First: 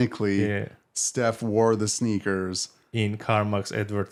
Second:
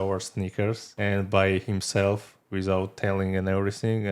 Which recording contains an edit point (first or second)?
second